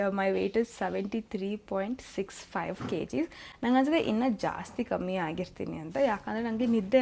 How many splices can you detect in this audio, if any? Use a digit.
0